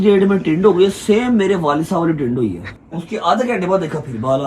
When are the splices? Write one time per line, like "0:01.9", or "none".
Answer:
0:02.7